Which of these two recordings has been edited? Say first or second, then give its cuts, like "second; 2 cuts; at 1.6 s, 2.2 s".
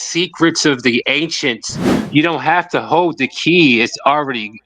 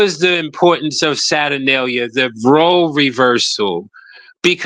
first; 1 cut; at 1.9 s